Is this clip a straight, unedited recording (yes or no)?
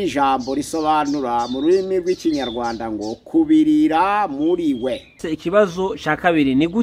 no